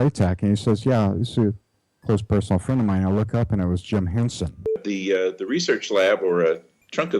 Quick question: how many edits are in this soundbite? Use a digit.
1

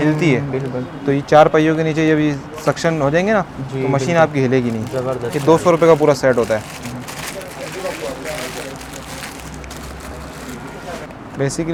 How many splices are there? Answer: 0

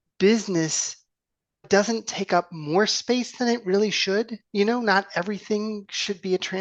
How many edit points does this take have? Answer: 1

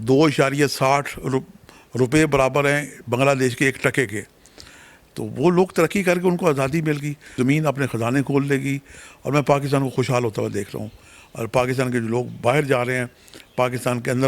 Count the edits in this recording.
1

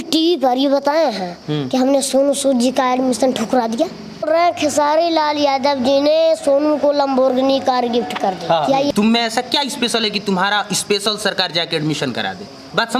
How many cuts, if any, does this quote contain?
2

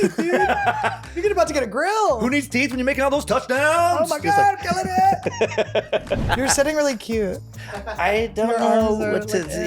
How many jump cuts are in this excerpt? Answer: 1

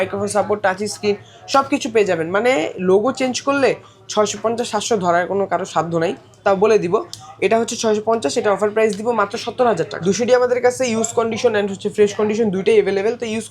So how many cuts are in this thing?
1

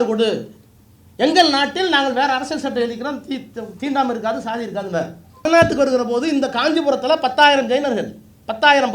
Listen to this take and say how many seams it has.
1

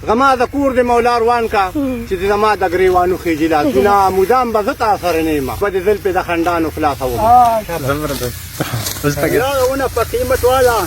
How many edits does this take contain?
2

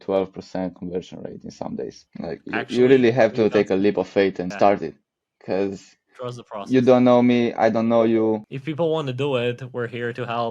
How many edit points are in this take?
3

